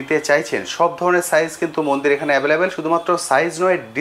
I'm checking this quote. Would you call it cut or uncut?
uncut